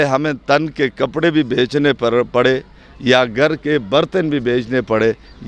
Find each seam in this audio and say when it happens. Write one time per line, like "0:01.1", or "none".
none